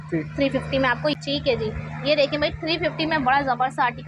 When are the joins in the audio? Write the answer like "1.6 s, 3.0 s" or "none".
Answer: 1.0 s